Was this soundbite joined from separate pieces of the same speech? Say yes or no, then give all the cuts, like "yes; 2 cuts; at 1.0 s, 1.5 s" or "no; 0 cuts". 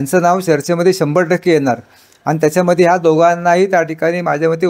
no; 0 cuts